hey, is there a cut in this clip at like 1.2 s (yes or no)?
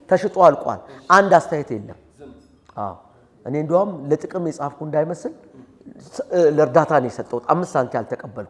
no